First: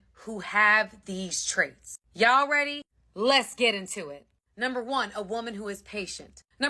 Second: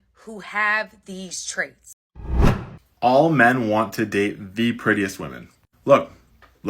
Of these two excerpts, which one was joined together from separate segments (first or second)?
second